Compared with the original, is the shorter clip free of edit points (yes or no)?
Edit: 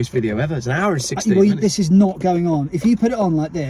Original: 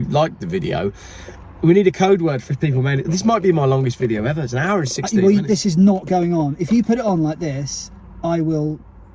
yes